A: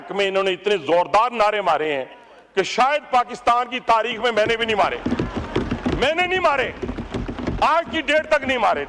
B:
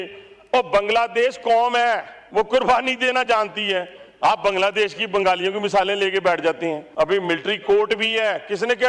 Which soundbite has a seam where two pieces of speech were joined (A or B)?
B